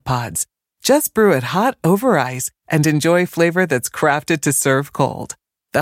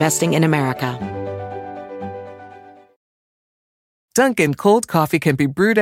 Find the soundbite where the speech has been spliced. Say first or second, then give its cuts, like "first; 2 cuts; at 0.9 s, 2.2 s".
second; 1 cut; at 0.9 s